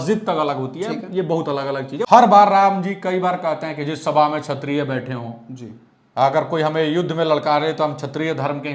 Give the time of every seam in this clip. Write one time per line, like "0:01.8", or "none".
0:02.1